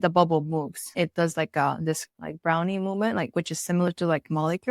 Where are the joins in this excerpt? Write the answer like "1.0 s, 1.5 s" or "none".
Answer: 0.9 s